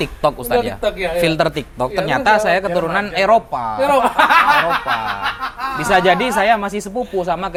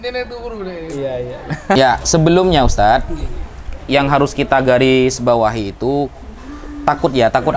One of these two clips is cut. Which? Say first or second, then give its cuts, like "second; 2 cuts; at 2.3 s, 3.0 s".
second; 1 cut; at 1.8 s